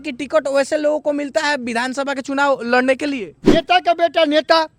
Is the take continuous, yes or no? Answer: no